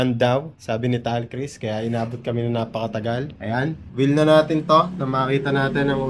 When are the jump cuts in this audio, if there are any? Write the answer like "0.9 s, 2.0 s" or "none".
3.8 s